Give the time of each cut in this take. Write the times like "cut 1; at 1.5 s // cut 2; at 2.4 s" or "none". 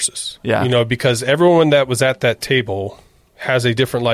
none